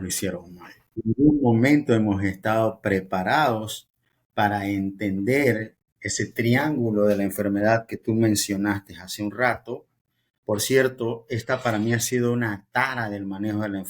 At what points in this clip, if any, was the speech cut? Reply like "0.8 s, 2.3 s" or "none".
1.0 s